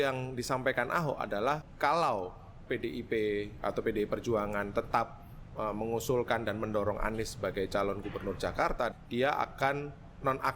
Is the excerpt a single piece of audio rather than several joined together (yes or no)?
no